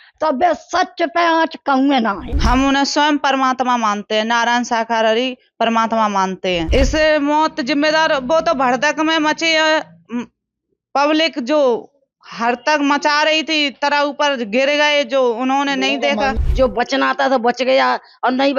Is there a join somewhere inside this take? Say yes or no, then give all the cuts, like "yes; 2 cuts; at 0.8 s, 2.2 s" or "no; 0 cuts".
yes; 3 cuts; at 2.3 s, 6.7 s, 16.3 s